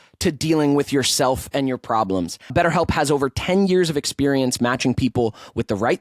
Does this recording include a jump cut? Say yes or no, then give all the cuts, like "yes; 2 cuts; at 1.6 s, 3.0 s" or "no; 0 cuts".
yes; 1 cut; at 2.4 s